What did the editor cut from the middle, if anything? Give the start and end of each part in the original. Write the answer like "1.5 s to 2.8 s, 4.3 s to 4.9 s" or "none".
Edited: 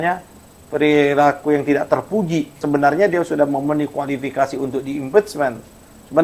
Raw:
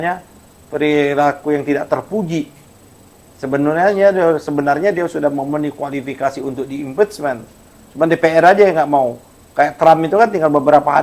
2.6 s to 4.4 s

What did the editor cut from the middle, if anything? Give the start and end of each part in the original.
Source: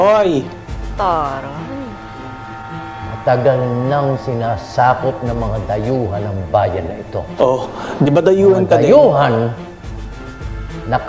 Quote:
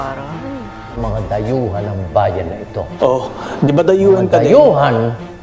2.2 s to 5.4 s

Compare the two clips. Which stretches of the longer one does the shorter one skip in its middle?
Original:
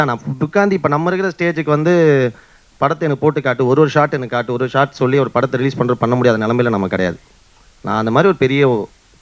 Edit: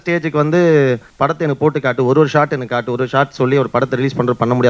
2.4 s to 2.7 s

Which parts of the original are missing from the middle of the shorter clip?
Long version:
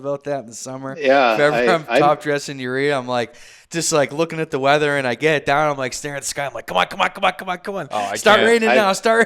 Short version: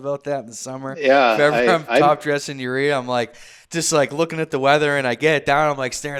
none

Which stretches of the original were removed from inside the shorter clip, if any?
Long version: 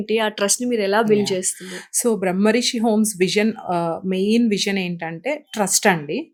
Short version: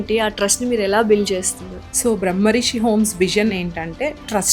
3.6 s to 4.8 s

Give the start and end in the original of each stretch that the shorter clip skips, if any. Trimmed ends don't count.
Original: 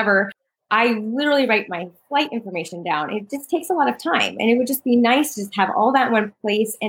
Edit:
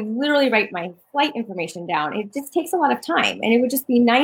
none

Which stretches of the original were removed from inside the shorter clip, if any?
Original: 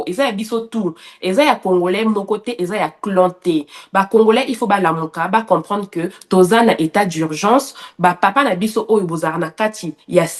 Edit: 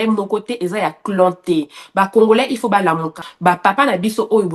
5.2 s to 7.8 s

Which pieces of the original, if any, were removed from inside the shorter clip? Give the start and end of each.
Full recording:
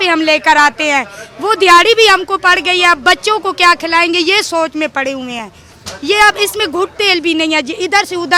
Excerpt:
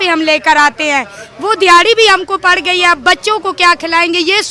none

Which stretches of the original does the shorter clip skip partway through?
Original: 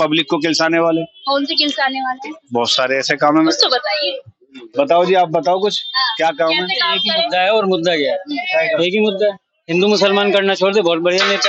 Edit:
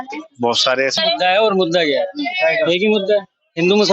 3.0 s to 7.0 s

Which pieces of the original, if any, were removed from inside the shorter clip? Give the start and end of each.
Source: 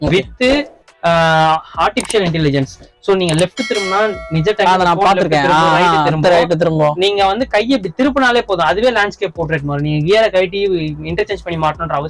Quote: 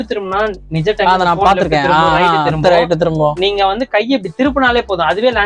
none

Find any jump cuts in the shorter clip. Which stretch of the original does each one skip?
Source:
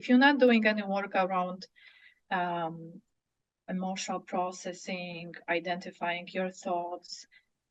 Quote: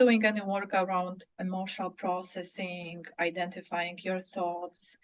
1.7 s to 3.5 s

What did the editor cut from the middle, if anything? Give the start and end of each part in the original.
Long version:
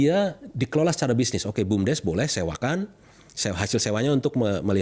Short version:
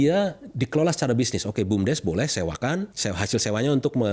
2.9 s to 3.3 s

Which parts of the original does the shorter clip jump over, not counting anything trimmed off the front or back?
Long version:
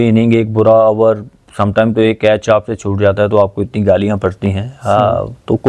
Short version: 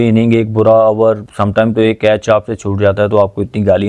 1.3 s to 1.5 s

